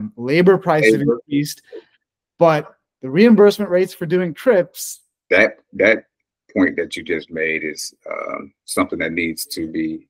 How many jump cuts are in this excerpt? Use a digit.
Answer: 1